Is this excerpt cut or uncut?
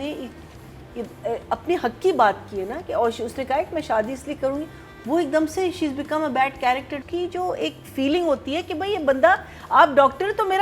cut